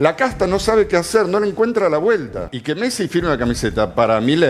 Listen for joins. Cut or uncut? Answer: cut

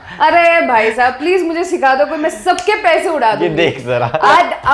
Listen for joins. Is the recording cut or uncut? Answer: uncut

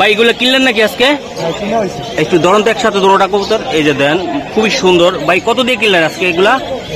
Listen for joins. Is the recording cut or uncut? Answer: uncut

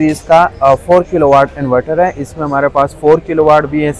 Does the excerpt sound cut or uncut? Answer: uncut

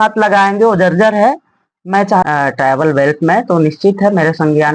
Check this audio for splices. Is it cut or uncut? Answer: cut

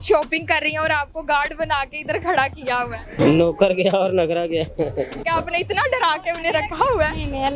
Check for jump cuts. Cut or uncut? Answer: cut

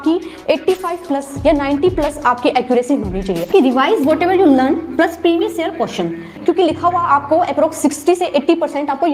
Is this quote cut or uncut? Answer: cut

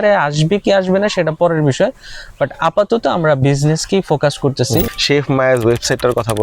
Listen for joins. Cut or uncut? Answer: cut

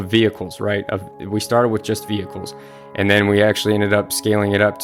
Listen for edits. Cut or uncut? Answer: uncut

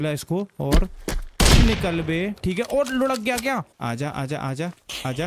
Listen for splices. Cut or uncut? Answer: cut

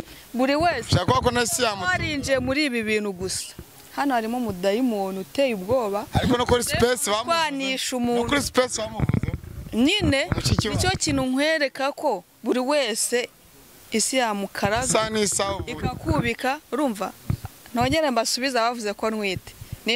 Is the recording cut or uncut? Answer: uncut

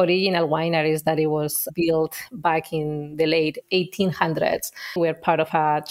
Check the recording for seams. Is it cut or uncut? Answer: cut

